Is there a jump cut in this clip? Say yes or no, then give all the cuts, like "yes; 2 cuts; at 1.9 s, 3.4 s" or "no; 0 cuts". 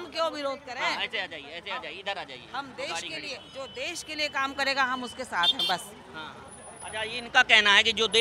no; 0 cuts